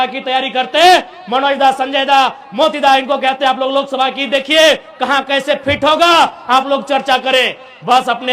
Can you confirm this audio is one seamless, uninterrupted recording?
yes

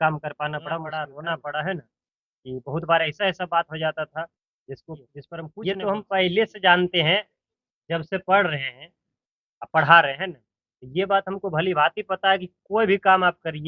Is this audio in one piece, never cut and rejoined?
no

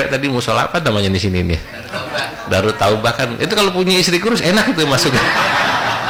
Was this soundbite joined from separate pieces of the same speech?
no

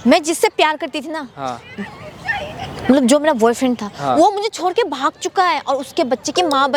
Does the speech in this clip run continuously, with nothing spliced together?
yes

